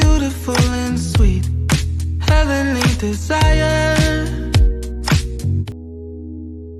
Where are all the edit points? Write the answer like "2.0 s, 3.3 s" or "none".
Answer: 5.7 s